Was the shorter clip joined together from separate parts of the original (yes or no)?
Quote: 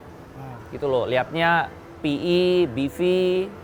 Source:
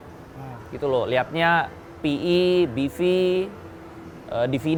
no